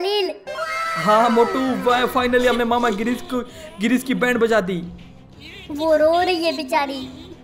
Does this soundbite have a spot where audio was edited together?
no; 0 cuts

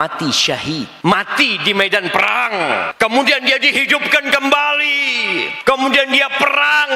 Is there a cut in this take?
yes; 3 cuts; at 0.9 s, 2.9 s, 5.5 s

